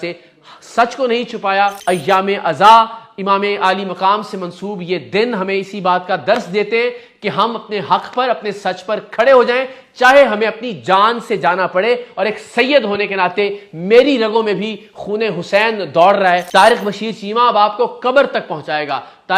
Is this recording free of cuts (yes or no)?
no